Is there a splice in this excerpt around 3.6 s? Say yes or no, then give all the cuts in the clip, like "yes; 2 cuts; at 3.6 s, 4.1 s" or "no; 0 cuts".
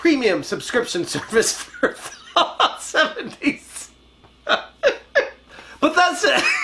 no; 1 cut; at 5.4 s